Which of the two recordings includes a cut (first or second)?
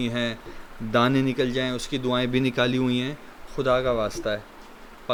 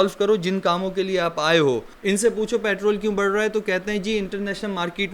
second